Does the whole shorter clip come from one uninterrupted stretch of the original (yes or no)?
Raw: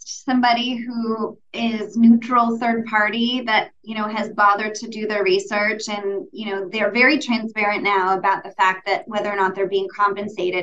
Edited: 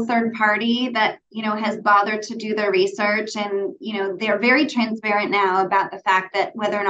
yes